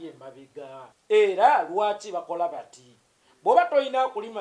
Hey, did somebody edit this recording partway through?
yes; 1 cut; at 0.9 s

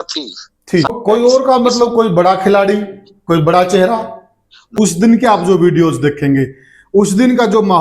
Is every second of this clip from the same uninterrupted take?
no; 2 cuts; at 0.9 s, 4.7 s

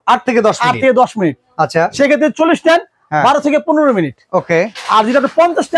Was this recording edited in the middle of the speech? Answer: no; 0 cuts

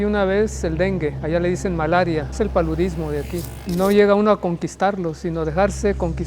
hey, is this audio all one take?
no; 3 cuts; at 1.2 s, 2.3 s, 3.5 s

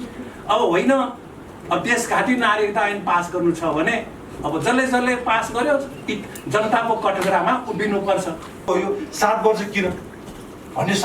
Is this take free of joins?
no; 1 cut; at 8.7 s

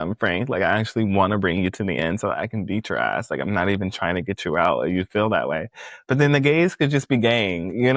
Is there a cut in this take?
no; 0 cuts

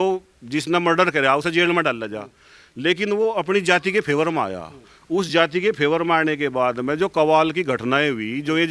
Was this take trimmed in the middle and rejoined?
no; 0 cuts

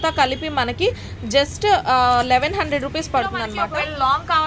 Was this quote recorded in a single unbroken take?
no; 1 cut; at 3.5 s

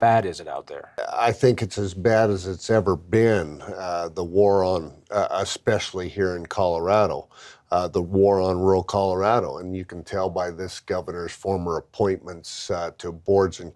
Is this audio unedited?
no; 1 cut; at 1.0 s

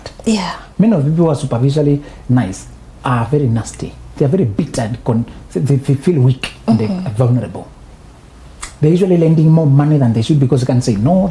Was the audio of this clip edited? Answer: no; 0 cuts

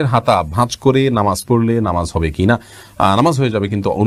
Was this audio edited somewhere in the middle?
no; 0 cuts

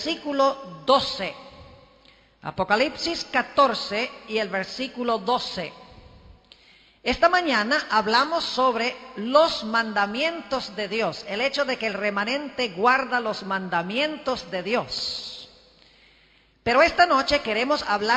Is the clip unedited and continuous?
yes; 0 cuts

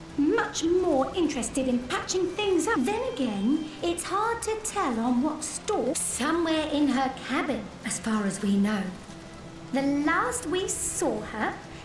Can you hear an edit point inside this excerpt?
yes; 2 cuts; at 2.7 s, 6.0 s

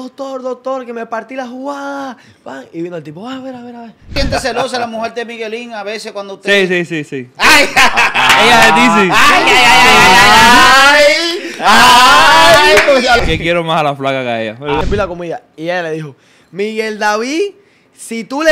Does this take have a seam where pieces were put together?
yes; 3 cuts; at 4.2 s, 13.2 s, 14.8 s

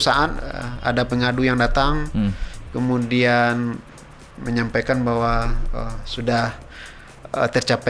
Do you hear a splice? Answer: no; 0 cuts

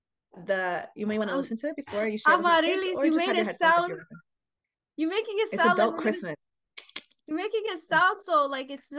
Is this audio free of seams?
yes; 0 cuts

